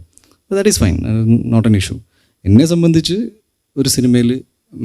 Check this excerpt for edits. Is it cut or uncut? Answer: uncut